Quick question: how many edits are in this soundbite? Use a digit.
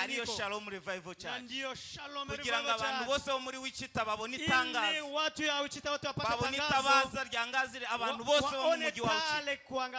0